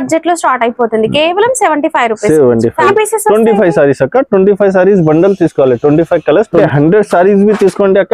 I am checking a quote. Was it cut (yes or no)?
yes